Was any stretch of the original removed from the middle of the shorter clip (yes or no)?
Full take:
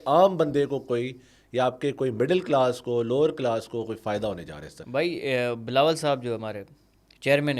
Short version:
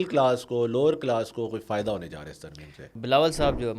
yes